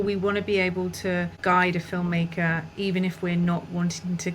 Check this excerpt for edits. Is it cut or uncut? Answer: cut